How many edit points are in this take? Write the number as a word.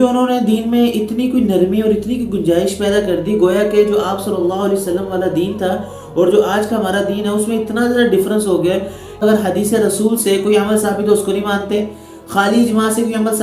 one